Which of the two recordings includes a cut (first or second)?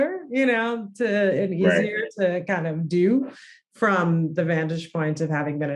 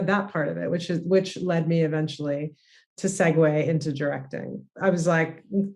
second